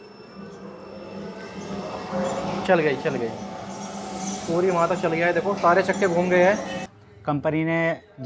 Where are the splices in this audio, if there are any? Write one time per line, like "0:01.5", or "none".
0:06.9